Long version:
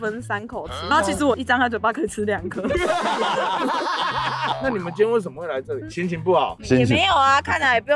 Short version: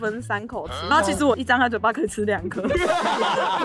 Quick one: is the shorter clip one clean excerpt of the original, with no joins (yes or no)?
yes